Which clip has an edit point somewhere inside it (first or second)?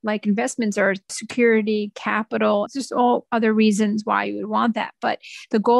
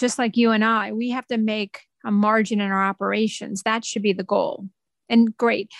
first